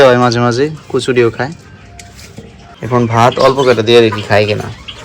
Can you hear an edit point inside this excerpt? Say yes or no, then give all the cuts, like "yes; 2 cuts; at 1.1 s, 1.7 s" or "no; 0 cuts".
yes; 1 cut; at 2.8 s